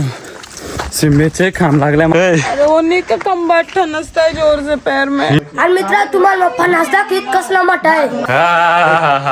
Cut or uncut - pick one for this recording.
cut